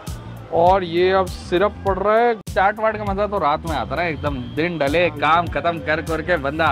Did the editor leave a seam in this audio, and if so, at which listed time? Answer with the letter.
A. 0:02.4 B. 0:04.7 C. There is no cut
A